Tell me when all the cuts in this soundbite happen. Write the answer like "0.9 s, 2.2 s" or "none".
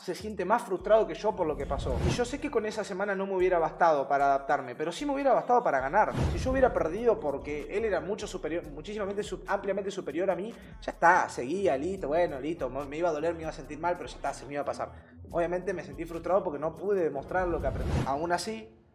2.0 s, 6.3 s, 17.9 s